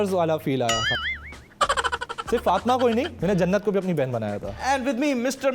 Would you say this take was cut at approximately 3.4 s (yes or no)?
no